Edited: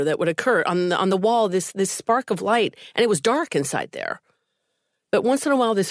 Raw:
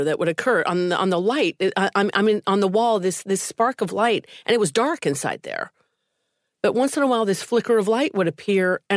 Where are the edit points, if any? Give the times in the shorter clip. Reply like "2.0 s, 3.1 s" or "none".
1.1 s